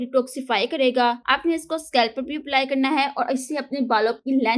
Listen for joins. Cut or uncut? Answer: cut